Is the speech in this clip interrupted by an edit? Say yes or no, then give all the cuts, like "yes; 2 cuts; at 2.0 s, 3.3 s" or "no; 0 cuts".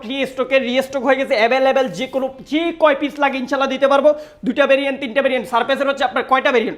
no; 0 cuts